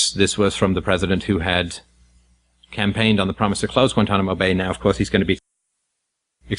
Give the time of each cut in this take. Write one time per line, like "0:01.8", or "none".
0:02.4

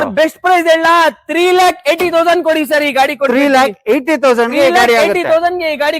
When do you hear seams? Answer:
none

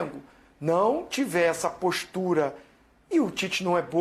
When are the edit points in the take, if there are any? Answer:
none

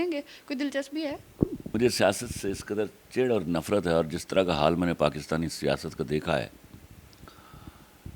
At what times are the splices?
0:01.7

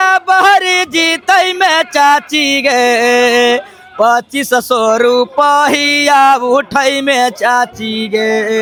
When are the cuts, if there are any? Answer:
none

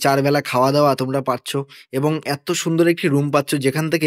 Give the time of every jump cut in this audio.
none

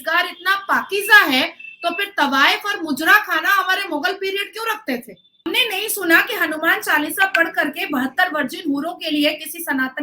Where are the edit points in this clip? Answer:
0:05.5

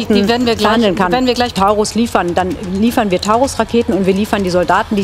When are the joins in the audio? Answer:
0:01.5

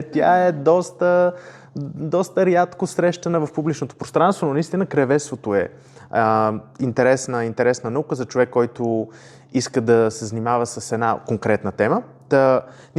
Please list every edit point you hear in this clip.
none

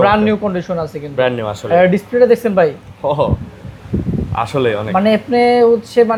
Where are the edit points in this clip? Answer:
none

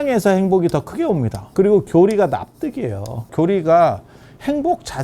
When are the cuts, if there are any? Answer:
0:01.4
0:03.3

